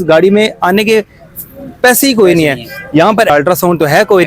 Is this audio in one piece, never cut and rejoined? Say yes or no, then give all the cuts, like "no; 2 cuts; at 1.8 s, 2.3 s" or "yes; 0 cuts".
no; 1 cut; at 3.3 s